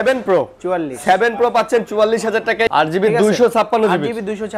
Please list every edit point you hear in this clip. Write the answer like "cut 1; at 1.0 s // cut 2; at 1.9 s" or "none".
cut 1; at 2.7 s